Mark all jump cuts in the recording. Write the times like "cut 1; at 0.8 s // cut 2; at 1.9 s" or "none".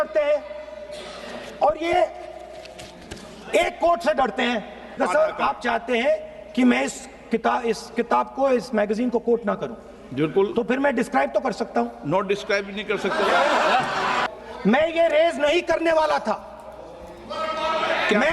cut 1; at 5.0 s // cut 2; at 14.2 s

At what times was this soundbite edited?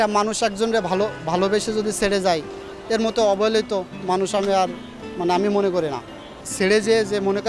cut 1; at 6.4 s

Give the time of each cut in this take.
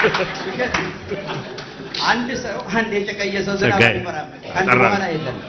none

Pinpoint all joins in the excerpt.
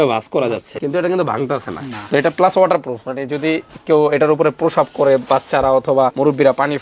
none

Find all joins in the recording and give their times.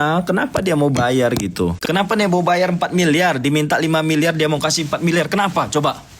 cut 1; at 1.1 s

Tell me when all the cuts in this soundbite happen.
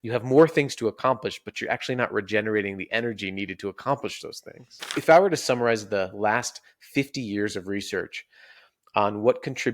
cut 1; at 5.0 s

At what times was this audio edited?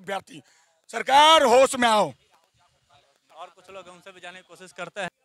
none

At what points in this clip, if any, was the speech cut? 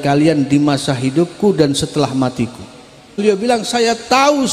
cut 1; at 3.2 s

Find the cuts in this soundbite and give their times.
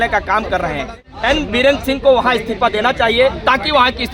cut 1; at 0.9 s

